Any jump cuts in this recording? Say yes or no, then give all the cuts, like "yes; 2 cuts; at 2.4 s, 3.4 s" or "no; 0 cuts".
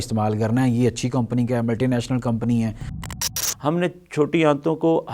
yes; 1 cut; at 3.1 s